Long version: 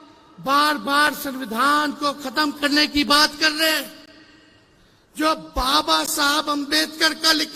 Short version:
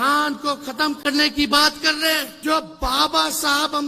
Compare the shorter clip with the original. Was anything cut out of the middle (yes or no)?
yes